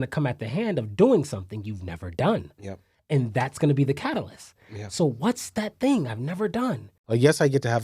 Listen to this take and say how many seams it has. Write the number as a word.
one